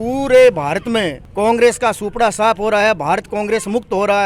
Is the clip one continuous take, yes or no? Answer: no